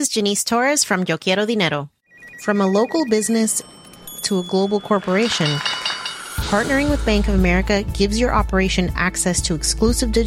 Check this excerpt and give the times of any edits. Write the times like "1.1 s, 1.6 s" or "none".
1.9 s